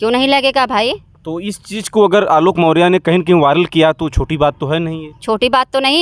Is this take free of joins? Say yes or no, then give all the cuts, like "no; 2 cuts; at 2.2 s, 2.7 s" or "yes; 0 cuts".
yes; 0 cuts